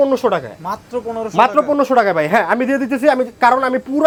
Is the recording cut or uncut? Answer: uncut